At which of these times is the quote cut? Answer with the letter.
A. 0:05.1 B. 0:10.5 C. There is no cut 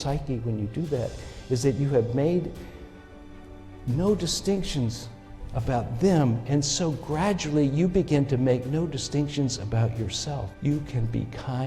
B